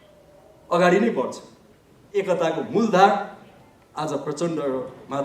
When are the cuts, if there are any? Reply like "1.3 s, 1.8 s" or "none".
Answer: 1.9 s